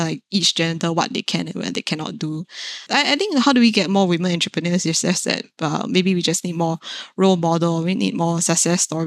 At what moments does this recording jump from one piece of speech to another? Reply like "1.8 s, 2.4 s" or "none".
2.7 s